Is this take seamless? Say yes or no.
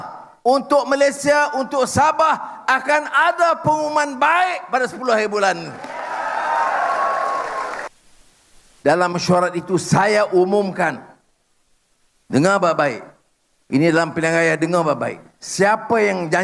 no